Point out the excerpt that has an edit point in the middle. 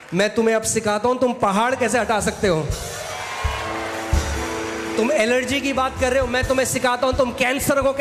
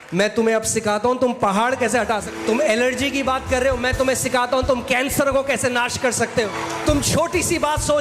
second; 2 cuts; at 2.3 s, 6.5 s

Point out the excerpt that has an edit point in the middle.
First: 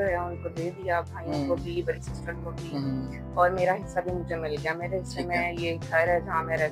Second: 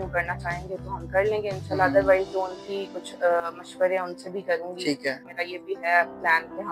second; 1 cut; at 5.3 s

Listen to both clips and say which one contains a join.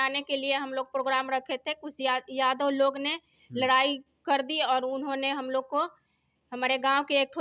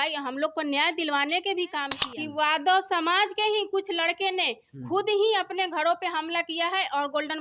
second; 1 cut; at 2.0 s

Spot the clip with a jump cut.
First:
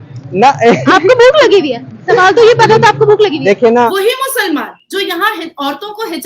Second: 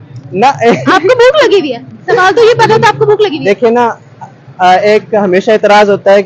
first; 1 cut; at 3.9 s

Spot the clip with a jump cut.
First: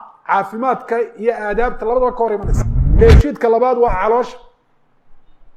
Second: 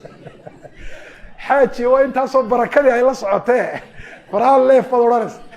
first; 1 cut; at 3.0 s

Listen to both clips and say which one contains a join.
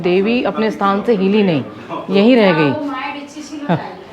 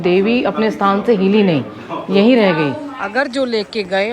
second; 1 cut; at 2.9 s

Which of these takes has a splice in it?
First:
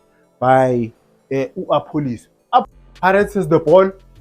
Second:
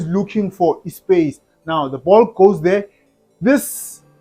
first; 1 cut; at 2.7 s

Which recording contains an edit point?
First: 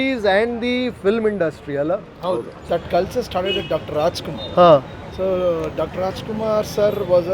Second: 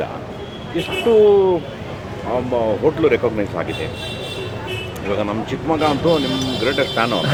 first; 1 cut; at 2.6 s

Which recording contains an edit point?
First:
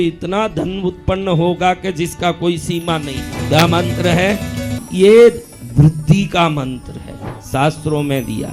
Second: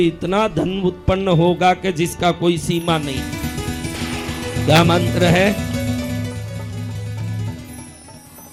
first; 2 cuts; at 3.3 s, 4.8 s

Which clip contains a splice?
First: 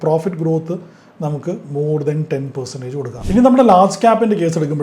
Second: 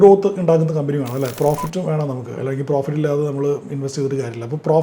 first; 1 cut; at 3.3 s

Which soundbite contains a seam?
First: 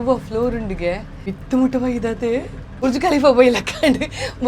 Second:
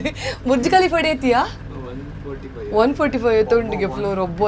first; 2 cuts; at 1.3 s, 2.8 s

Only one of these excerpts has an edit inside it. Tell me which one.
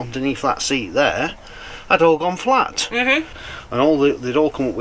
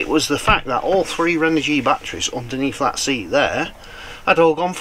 first; 1 cut; at 3.4 s

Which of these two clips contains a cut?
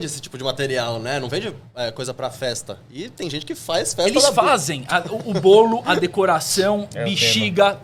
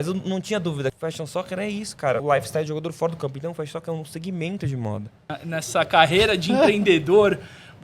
second; 3 cuts; at 1.0 s, 2.2 s, 5.3 s

